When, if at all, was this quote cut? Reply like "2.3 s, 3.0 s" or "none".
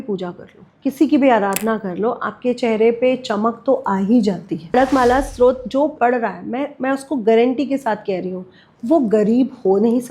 4.7 s